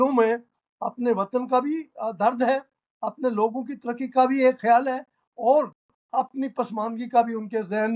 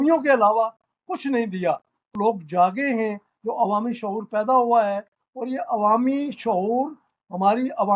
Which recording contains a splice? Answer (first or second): second